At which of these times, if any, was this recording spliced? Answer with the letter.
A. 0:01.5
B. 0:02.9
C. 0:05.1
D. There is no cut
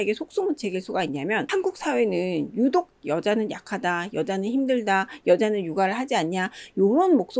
A